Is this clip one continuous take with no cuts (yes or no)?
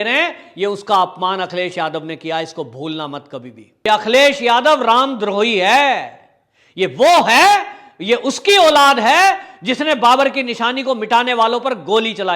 no